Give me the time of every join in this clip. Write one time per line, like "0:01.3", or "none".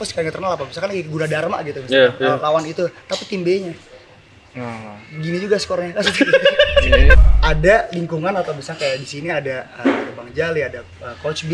0:07.2